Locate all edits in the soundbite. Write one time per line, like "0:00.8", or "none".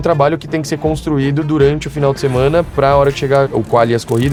none